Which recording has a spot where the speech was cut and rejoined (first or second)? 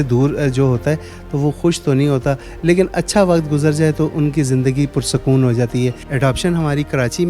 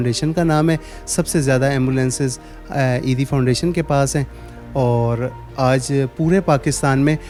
first